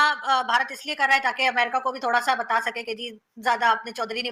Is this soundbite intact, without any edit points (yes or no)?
yes